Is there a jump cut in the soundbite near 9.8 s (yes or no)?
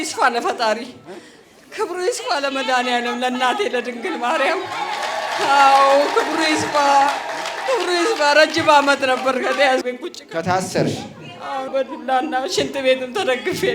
yes